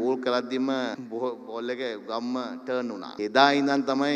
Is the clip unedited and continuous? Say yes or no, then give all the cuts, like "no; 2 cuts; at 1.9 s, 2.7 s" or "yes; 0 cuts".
no; 2 cuts; at 1.0 s, 3.2 s